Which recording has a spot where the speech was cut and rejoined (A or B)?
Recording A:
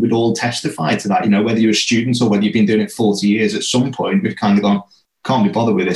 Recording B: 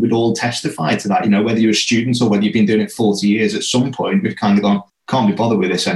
B